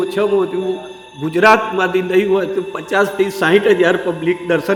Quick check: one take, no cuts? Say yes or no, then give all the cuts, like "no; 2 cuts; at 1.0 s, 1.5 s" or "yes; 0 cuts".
yes; 0 cuts